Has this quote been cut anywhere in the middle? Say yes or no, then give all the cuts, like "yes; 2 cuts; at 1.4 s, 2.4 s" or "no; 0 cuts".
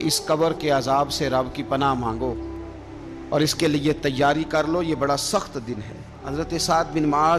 yes; 1 cut; at 6.2 s